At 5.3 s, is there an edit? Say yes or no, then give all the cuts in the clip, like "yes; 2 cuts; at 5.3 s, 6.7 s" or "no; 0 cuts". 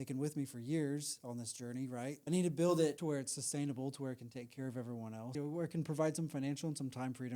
yes; 3 cuts; at 2.2 s, 3.0 s, 5.3 s